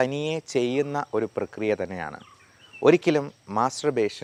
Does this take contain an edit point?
no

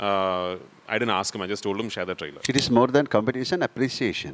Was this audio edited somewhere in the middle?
yes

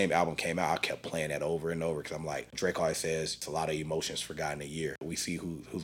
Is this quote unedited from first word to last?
no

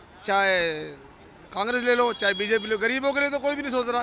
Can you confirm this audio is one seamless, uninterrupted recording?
yes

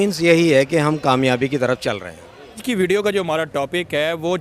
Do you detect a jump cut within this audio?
yes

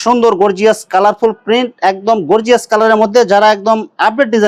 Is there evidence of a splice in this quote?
no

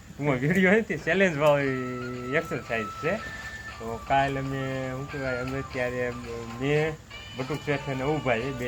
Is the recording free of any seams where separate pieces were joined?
yes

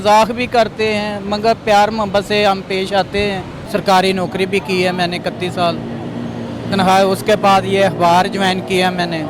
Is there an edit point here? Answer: yes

